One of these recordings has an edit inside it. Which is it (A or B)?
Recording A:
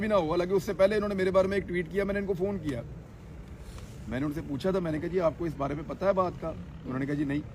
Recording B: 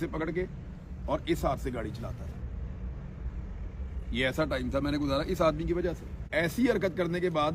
B